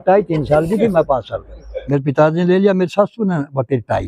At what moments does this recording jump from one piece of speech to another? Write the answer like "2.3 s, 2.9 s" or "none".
1.7 s